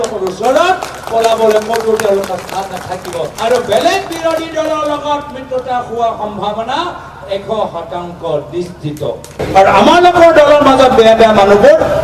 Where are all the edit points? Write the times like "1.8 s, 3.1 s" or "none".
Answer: 3.3 s, 9.3 s